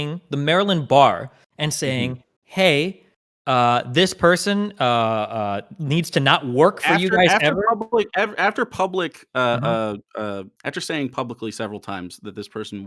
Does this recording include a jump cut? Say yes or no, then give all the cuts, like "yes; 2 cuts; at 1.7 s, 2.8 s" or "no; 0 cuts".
yes; 1 cut; at 10.5 s